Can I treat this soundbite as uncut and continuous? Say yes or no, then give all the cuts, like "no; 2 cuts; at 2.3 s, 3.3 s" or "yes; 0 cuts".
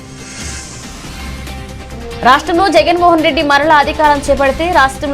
no; 1 cut; at 1.6 s